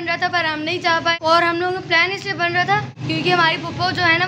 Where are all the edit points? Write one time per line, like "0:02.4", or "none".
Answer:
0:01.1
0:02.9